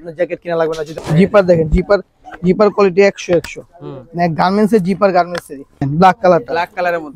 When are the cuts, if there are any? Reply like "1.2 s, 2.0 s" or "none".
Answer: 0.9 s, 5.9 s

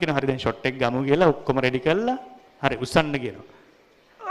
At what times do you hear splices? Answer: none

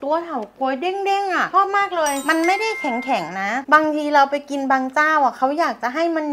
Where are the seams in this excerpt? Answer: none

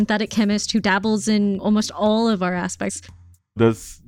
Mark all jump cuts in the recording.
1.6 s, 3.0 s

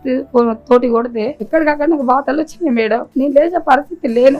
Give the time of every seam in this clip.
1.4 s, 3.1 s

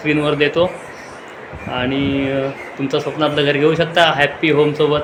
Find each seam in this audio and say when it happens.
none

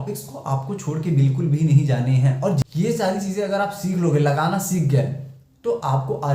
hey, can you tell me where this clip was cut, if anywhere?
2.6 s

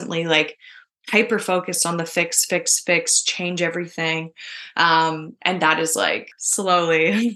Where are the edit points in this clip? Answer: 6.4 s

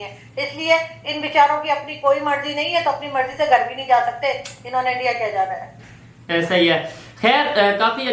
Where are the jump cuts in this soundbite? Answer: none

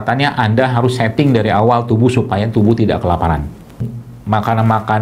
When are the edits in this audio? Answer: 3.9 s

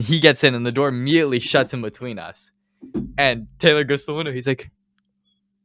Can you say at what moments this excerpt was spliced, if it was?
none

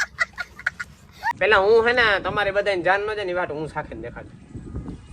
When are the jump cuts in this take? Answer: 1.2 s

